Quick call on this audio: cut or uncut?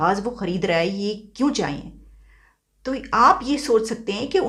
uncut